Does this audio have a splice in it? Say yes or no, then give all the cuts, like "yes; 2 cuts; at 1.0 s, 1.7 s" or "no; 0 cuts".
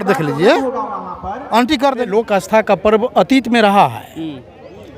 yes; 1 cut; at 2.0 s